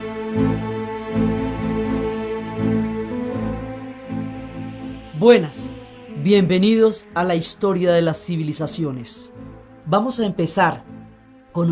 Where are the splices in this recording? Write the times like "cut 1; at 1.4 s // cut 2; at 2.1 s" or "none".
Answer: cut 1; at 2.3 s

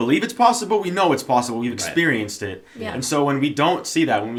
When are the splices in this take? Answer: none

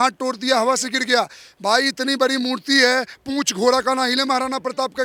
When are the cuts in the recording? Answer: none

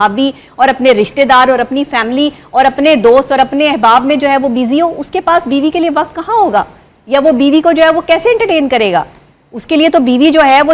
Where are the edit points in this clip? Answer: none

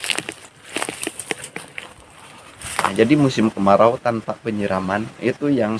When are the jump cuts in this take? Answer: cut 1; at 2.9 s

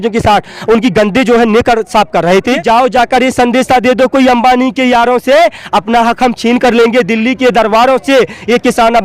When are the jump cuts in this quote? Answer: cut 1; at 2.5 s

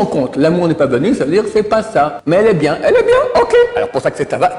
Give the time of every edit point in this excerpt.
none

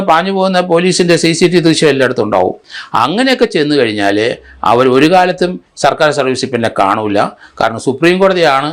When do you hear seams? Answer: none

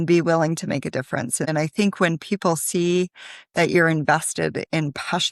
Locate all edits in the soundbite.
cut 1; at 1.4 s

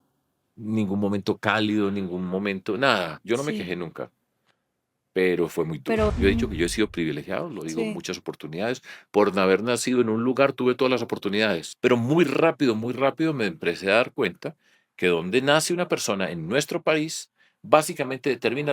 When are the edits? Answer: cut 1; at 3.2 s // cut 2; at 6.1 s // cut 3; at 11.7 s

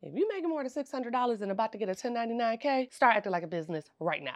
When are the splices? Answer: cut 1; at 2.9 s

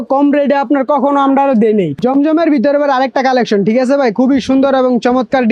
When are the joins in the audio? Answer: cut 1; at 1.9 s

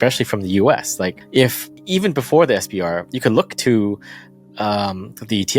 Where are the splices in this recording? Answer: cut 1; at 1.2 s

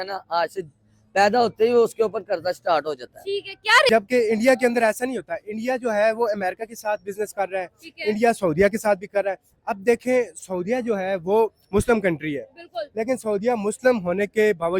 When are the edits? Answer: cut 1; at 3.9 s

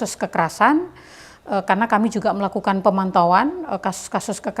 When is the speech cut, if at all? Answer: none

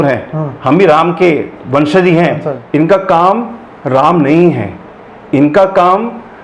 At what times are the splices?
cut 1; at 2.5 s

